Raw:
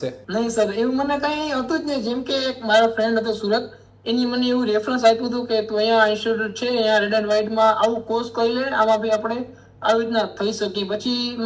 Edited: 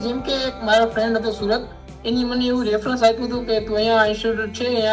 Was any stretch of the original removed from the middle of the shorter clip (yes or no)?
no